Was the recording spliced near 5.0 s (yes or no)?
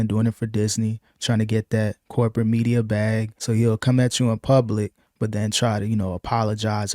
no